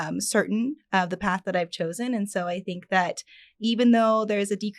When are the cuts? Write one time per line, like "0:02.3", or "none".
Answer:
none